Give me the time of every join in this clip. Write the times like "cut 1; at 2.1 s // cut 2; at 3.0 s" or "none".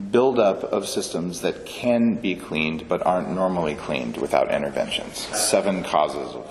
cut 1; at 5.3 s